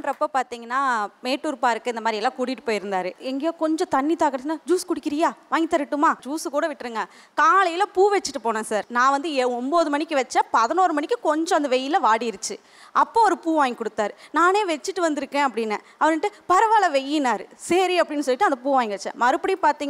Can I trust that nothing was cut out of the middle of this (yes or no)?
yes